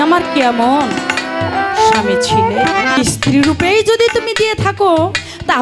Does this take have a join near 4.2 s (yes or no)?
no